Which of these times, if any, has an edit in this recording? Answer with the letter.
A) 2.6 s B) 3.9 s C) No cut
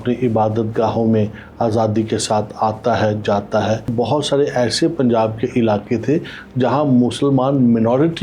B